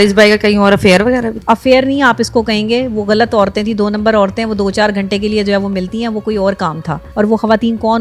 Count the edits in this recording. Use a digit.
1